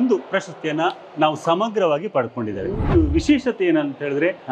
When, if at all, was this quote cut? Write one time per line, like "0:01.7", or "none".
0:02.9